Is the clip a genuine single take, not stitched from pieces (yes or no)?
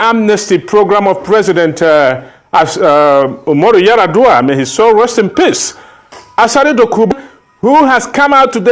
no